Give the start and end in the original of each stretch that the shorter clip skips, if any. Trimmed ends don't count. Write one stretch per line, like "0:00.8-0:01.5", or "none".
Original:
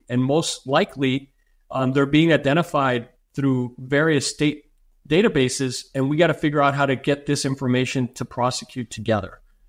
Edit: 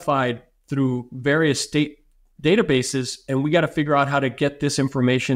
none